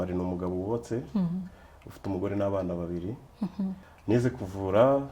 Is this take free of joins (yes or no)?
no